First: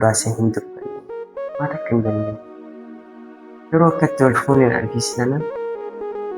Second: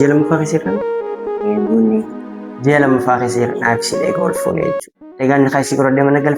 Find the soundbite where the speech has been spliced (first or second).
first